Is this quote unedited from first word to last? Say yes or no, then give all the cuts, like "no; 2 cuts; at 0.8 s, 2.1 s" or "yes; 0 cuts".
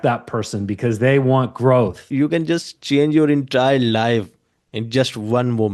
no; 1 cut; at 2.0 s